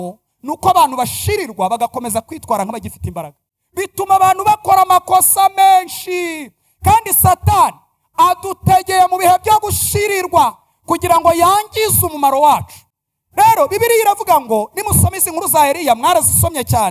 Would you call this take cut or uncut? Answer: uncut